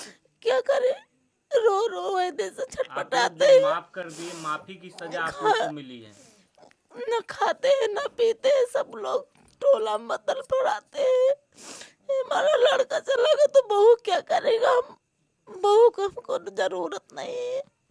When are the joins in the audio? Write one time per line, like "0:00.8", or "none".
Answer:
none